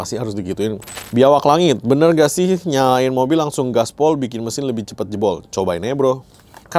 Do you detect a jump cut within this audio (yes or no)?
yes